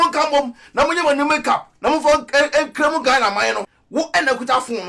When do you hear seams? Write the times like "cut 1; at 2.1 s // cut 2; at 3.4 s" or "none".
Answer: cut 1; at 3.7 s